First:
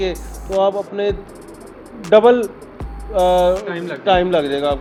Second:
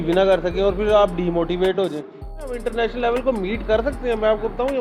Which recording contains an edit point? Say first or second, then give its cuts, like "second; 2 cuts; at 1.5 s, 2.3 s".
second; 1 cut; at 2.5 s